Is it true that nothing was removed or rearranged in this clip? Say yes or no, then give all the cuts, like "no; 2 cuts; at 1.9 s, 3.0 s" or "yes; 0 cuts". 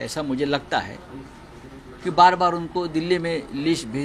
yes; 0 cuts